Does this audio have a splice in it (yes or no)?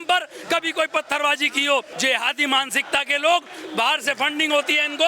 yes